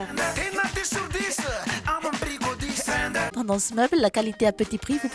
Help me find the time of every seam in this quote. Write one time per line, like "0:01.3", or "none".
0:03.3